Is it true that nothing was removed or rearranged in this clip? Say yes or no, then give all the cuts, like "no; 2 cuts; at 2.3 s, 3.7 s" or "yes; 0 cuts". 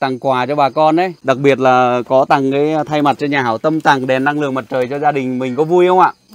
no; 1 cut; at 1.2 s